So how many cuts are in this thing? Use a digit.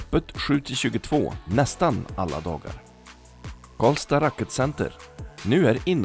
0